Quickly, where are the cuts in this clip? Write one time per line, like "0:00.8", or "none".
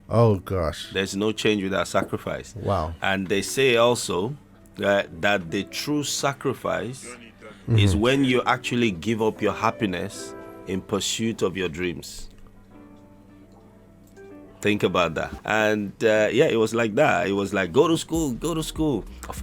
0:15.3